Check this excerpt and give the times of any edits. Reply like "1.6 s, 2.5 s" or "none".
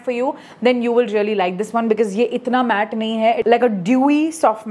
none